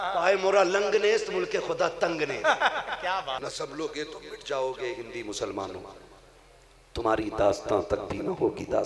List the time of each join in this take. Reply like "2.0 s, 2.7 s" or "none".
3.4 s